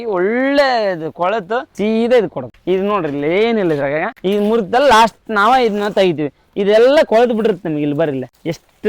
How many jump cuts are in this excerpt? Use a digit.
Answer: 3